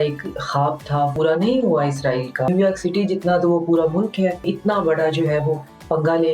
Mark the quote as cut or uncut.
cut